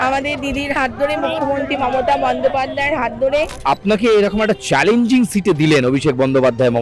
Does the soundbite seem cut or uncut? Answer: cut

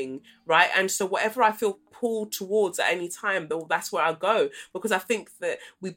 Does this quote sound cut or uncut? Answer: uncut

